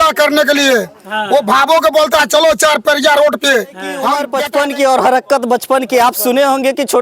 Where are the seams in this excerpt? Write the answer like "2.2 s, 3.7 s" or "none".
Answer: 4.3 s